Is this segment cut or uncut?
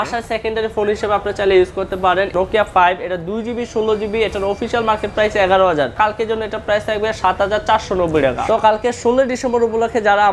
cut